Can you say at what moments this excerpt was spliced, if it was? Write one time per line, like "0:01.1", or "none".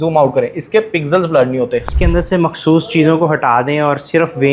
0:01.9